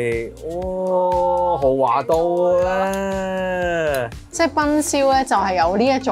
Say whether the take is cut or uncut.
uncut